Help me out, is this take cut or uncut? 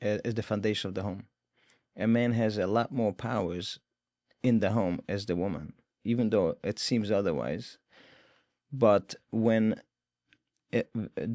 uncut